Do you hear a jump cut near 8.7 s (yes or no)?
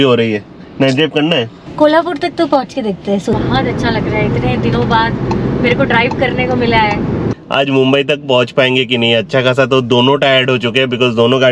no